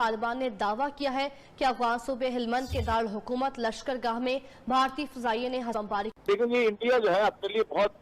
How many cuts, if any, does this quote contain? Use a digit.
1